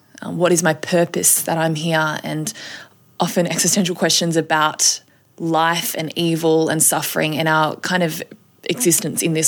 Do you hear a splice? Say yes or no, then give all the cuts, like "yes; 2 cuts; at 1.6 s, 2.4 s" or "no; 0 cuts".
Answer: no; 0 cuts